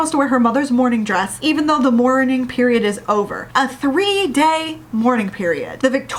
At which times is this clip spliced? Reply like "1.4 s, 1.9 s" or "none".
none